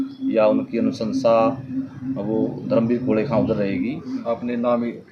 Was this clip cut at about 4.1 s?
yes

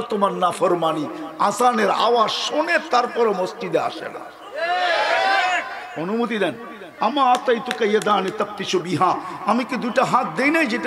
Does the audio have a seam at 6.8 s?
yes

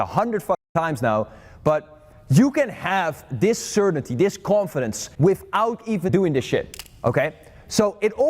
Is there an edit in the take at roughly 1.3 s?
no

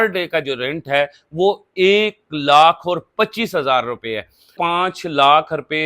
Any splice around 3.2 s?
no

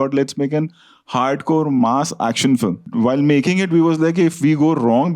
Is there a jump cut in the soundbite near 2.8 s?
yes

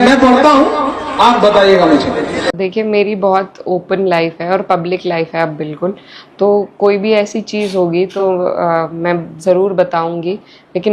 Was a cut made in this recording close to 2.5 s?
yes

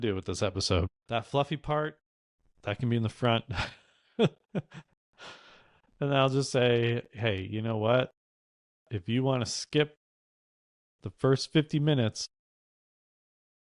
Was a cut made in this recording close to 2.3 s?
no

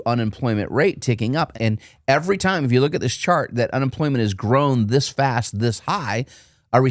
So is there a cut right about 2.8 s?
no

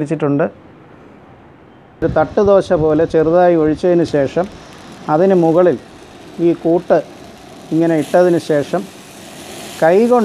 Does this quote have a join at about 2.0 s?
yes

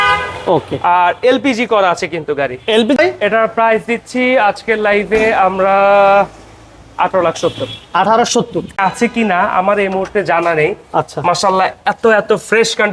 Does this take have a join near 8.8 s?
yes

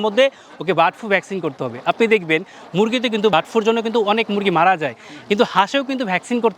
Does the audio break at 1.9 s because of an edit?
no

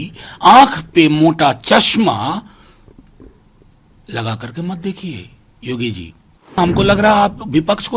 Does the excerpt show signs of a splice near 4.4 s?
no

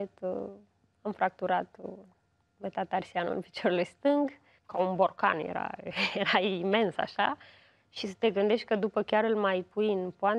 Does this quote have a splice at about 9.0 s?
no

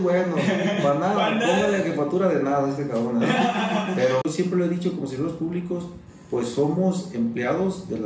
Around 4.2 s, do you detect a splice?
yes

